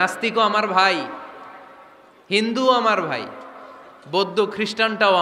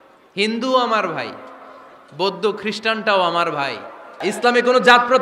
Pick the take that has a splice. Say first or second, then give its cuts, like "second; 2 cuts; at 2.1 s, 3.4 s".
second; 1 cut; at 4.2 s